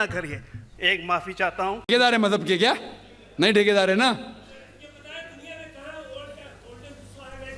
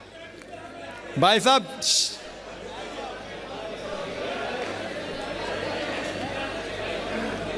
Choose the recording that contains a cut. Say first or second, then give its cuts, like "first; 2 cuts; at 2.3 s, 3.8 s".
first; 1 cut; at 1.9 s